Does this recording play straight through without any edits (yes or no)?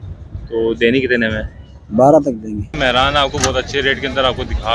no